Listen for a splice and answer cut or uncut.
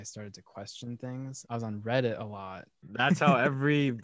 cut